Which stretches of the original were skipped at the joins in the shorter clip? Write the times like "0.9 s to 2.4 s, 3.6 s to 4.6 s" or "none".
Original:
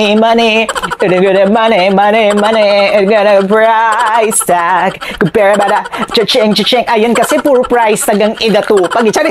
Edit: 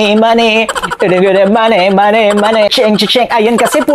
2.7 s to 6.3 s